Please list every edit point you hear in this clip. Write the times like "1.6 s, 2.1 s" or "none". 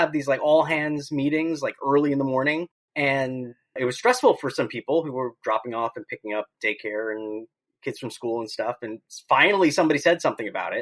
2.8 s, 3.7 s